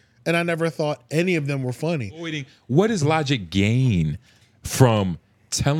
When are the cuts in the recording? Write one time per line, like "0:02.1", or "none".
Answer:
0:02.4